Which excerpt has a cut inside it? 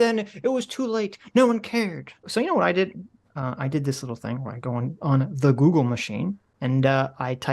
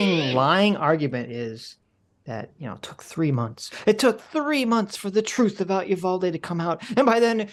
first; 2 cuts; at 2.3 s, 6.5 s

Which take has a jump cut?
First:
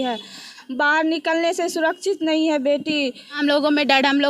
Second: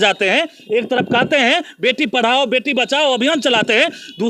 first; 1 cut; at 3.4 s

